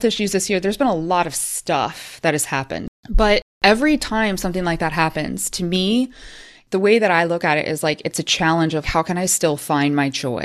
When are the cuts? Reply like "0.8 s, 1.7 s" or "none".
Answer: none